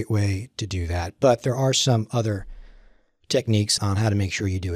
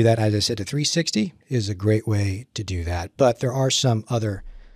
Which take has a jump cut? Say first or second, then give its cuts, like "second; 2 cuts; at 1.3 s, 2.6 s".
first; 1 cut; at 3.7 s